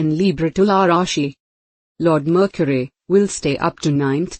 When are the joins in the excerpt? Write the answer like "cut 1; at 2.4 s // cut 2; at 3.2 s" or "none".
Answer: cut 1; at 1.6 s